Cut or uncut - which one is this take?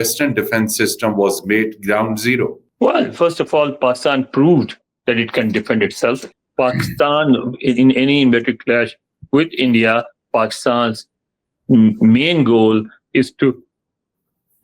cut